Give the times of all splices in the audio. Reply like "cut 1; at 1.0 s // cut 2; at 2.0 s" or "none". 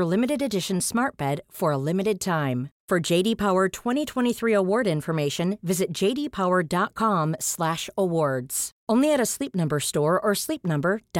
none